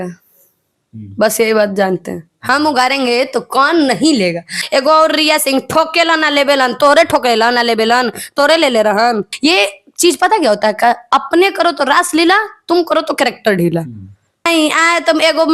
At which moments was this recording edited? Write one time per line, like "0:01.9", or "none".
0:04.6
0:09.3
0:14.5